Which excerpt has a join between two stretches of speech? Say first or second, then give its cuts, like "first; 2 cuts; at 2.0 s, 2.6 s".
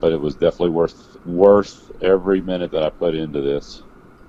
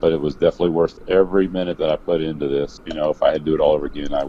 second; 2 cuts; at 1.0 s, 2.8 s